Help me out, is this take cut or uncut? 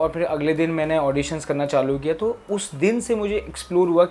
uncut